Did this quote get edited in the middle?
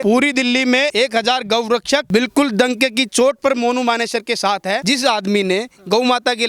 yes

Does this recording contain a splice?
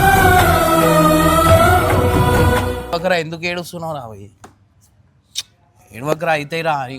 yes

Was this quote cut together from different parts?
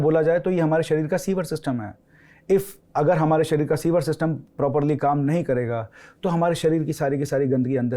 no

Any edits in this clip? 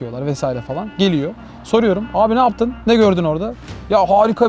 no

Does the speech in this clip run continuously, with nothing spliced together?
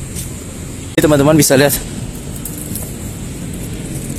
no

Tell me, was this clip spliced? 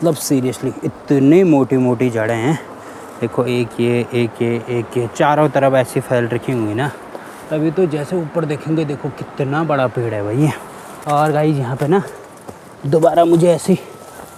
no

